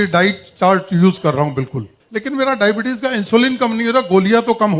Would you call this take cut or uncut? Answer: cut